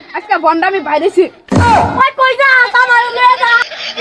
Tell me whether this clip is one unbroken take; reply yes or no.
yes